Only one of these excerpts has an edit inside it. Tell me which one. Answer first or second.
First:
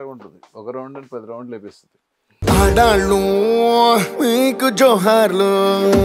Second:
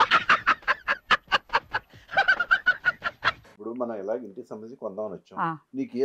second